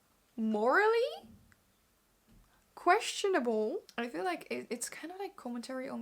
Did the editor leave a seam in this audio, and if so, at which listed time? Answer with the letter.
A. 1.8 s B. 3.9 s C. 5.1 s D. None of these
B